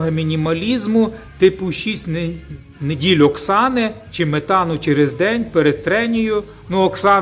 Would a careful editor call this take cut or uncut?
uncut